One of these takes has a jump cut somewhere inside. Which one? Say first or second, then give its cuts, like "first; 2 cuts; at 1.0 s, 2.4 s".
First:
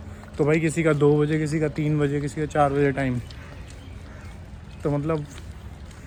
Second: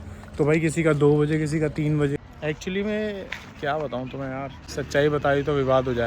second; 2 cuts; at 2.2 s, 4.6 s